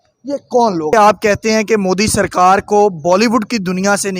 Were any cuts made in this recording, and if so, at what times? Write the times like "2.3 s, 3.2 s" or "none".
1.0 s